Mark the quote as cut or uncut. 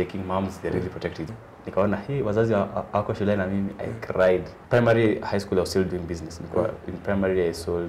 cut